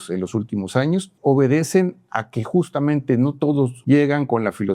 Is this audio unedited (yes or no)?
no